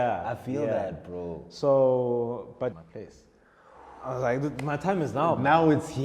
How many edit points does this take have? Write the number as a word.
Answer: one